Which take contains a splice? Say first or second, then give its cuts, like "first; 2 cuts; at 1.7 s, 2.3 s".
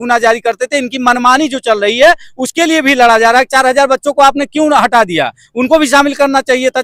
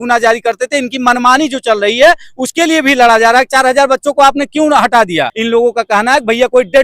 second; 1 cut; at 5.3 s